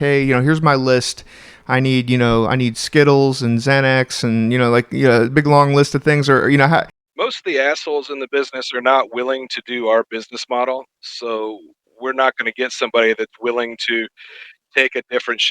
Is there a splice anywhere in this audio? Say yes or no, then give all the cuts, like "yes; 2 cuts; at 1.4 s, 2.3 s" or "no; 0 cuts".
yes; 1 cut; at 7.0 s